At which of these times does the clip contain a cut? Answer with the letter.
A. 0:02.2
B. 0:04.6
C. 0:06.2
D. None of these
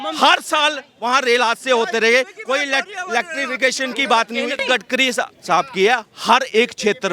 B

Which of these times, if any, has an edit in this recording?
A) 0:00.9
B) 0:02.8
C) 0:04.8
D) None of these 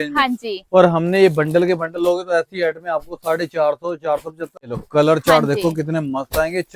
C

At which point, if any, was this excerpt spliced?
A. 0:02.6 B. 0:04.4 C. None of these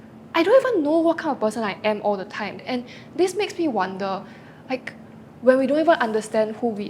A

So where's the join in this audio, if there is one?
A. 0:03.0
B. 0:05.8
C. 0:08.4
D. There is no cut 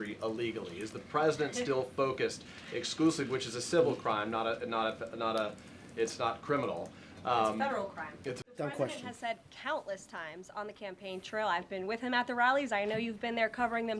C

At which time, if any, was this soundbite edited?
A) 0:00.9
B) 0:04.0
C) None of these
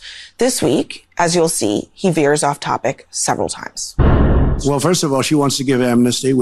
B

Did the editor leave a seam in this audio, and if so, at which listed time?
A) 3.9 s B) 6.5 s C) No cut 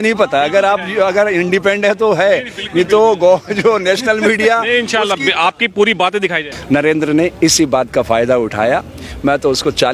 B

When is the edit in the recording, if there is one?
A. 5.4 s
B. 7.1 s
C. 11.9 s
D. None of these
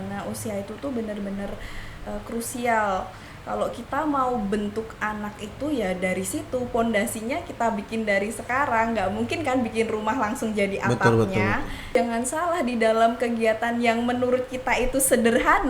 C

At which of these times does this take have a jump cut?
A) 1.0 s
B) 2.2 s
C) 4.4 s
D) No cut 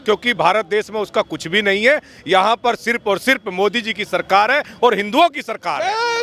D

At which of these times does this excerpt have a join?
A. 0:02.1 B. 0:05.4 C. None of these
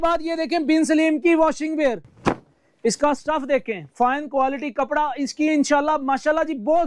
A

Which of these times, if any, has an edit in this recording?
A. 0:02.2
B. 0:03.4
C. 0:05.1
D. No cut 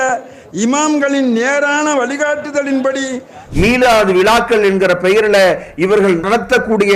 B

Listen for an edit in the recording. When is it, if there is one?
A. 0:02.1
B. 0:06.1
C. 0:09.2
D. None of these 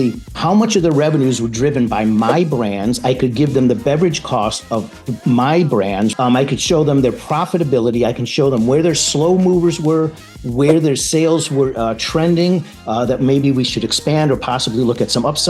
B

